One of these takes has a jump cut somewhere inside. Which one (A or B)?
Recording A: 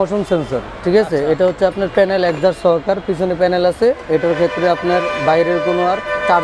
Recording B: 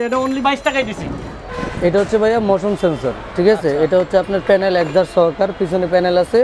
B